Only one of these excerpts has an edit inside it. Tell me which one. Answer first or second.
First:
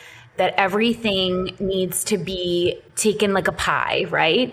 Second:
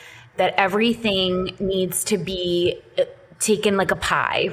first